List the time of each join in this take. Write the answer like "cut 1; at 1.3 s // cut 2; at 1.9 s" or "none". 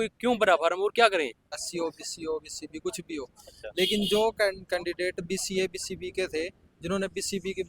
cut 1; at 1.6 s